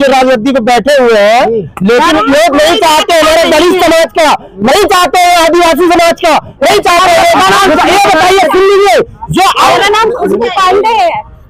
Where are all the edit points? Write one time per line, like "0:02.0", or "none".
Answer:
0:09.6